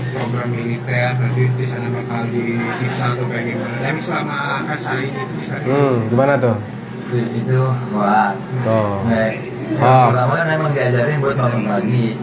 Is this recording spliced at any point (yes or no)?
no